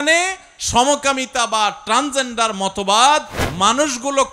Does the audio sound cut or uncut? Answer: cut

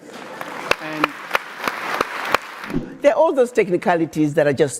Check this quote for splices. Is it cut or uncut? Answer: cut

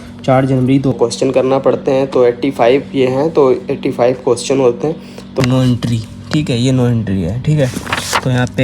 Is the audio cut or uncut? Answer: cut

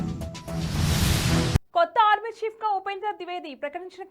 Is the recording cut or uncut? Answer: cut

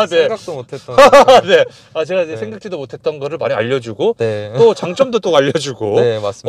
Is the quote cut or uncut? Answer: uncut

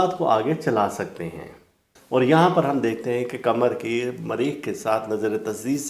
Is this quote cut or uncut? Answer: cut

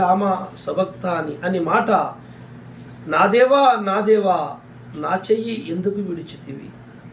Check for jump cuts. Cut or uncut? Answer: uncut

